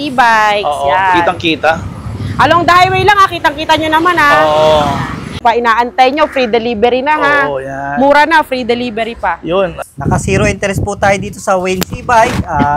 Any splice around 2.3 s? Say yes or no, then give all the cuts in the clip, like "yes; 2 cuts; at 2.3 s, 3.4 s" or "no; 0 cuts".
no; 2 cuts; at 5.3 s, 9.8 s